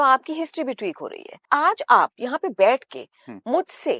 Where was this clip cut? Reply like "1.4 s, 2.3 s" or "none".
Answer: 1.5 s